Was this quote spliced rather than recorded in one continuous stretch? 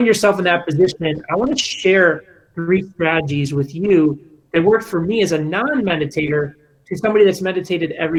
no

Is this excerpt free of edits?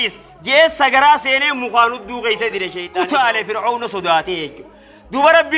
no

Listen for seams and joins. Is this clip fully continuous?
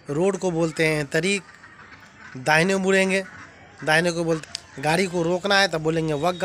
no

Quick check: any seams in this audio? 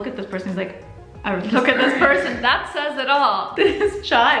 no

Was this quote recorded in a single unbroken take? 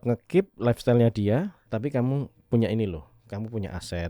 no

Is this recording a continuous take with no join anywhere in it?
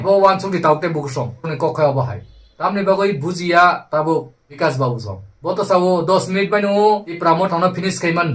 yes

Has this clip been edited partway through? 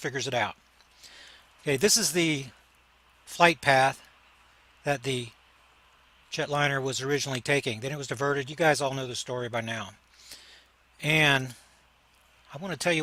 no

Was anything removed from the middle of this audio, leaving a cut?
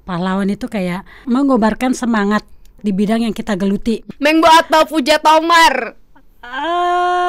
yes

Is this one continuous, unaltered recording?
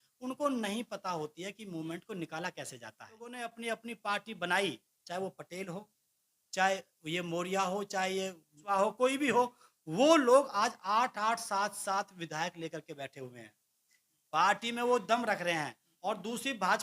no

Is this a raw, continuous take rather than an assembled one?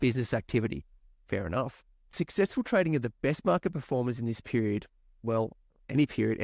no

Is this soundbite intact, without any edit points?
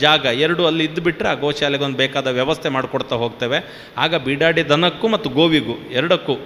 yes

